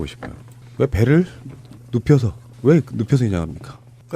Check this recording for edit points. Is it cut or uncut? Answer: cut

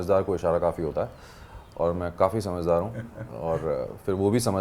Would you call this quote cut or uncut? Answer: uncut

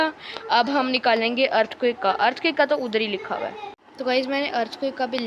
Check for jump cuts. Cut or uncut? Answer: cut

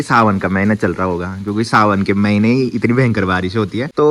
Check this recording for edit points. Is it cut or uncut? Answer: uncut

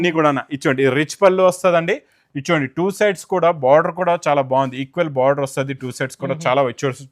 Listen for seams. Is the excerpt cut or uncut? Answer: uncut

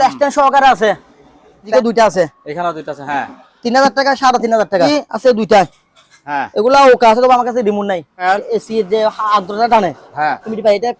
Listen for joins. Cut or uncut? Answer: cut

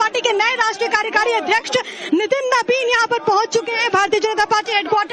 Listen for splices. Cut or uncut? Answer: cut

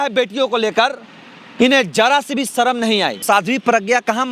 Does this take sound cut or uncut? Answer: cut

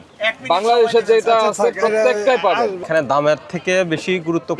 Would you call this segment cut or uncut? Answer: cut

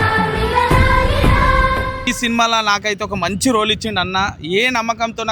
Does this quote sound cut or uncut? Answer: uncut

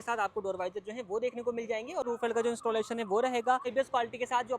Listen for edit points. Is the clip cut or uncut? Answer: cut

